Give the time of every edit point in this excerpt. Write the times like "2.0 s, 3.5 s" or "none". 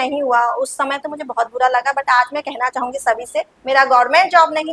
3.6 s